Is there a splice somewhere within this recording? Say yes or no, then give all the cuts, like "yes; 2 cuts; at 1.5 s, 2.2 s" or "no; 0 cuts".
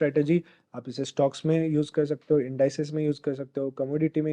no; 0 cuts